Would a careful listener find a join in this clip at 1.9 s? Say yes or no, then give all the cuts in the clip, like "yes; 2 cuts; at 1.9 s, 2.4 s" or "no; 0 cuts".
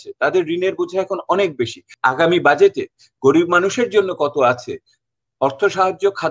yes; 1 cut; at 1.9 s